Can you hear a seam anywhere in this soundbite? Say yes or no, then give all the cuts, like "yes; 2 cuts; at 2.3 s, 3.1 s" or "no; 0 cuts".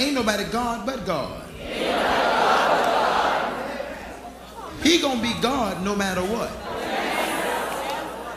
no; 0 cuts